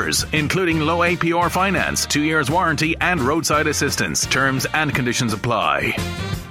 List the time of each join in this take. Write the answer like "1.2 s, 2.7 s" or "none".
none